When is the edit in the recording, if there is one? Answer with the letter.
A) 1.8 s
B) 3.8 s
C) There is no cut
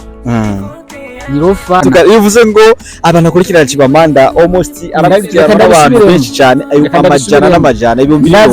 A